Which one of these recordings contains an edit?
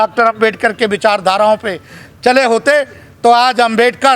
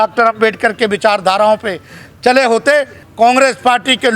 second; 1 cut; at 3.0 s

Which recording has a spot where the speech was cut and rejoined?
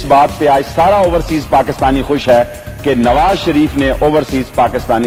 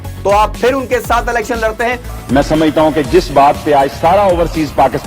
second; 1 cut; at 2.1 s

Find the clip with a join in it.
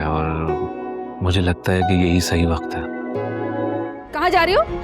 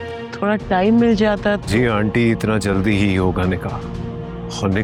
first; 1 cut; at 3.9 s

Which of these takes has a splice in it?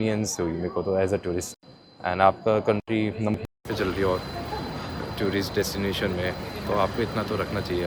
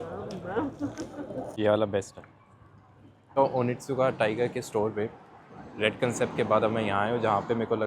second; 2 cuts; at 1.5 s, 3.4 s

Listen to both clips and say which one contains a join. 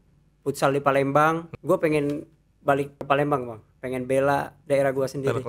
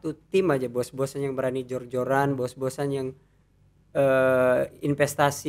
first; 3 cuts; at 1.5 s, 3.1 s, 4.6 s

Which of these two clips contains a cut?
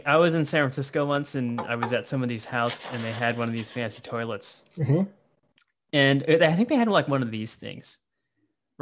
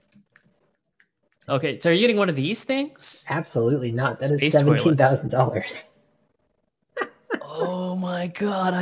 second; 1 cut; at 1.4 s

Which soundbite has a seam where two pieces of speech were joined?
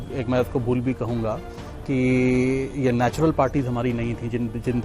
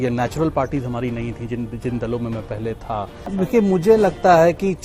second; 1 cut; at 3.3 s

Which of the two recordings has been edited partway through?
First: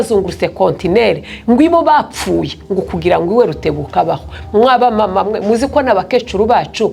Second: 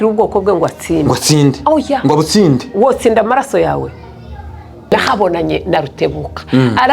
second; 1 cut; at 4.9 s

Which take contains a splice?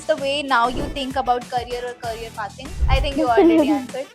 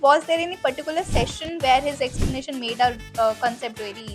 first; 1 cut; at 2.7 s

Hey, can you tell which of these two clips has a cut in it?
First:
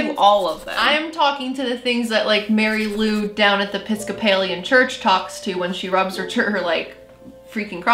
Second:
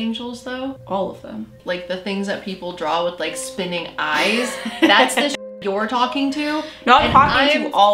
second; 2 cuts; at 0.8 s, 1.6 s

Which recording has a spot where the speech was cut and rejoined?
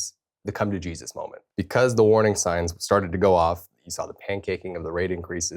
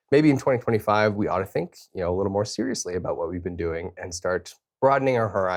first; 1 cut; at 1.4 s

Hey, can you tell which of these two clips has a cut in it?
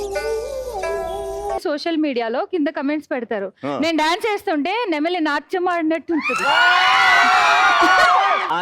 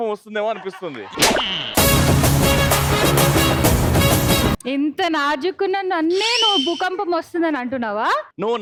first; 1 cut; at 1.6 s

